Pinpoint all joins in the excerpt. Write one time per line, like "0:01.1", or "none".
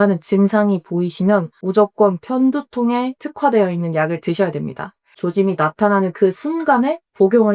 0:03.2
0:05.1